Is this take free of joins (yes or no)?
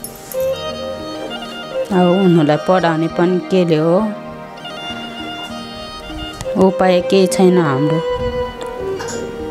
no